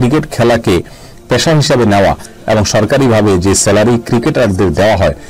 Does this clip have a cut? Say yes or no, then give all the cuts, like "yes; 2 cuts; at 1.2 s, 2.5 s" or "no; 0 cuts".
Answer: no; 0 cuts